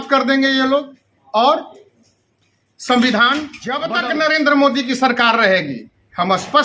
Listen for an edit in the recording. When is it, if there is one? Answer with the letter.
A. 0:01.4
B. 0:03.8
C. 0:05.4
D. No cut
B